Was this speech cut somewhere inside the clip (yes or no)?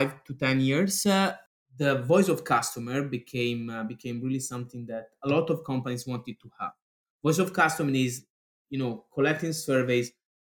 yes